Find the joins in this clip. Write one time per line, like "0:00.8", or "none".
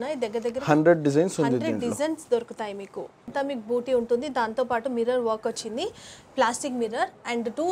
0:03.3